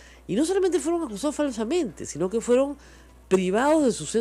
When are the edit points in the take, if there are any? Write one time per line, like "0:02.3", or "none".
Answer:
none